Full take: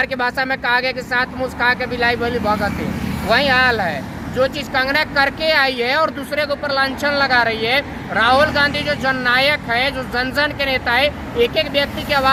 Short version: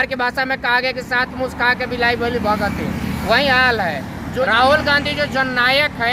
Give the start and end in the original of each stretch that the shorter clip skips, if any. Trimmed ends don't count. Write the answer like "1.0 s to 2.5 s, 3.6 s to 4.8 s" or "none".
4.5 s to 8.2 s